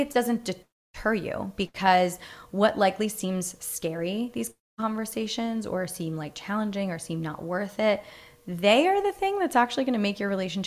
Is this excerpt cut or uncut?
uncut